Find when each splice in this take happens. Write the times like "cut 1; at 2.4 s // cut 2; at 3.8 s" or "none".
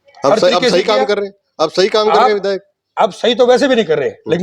none